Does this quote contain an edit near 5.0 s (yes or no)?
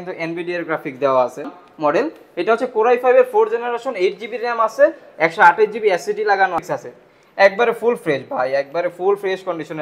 no